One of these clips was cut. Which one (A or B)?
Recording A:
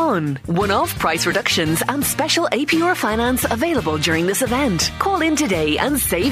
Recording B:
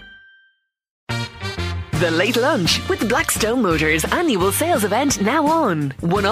B